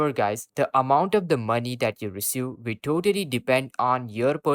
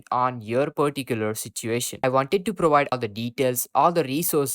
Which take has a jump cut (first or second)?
second